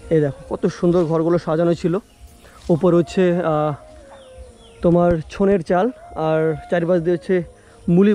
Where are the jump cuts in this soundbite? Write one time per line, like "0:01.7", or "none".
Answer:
none